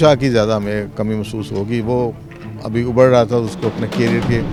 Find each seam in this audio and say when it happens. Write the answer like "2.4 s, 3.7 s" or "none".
none